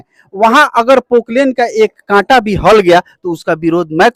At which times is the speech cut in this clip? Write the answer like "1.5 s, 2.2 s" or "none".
none